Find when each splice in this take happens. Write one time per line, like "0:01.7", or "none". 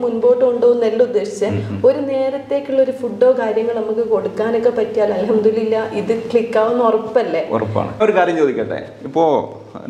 0:08.0